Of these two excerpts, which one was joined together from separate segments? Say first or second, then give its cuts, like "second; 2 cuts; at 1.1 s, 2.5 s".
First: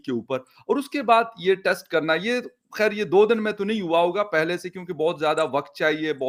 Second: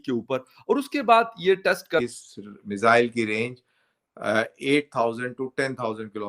second; 1 cut; at 2.0 s